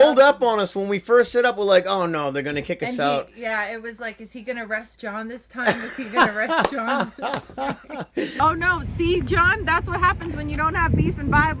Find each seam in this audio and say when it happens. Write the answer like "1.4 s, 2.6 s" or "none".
8.4 s